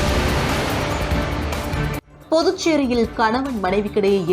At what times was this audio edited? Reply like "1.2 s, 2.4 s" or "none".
1.9 s